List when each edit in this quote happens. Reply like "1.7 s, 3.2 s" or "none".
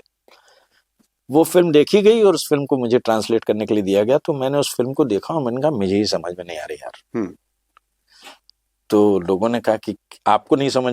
none